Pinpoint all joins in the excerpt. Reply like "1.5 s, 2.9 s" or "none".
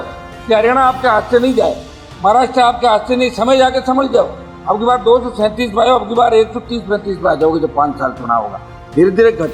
none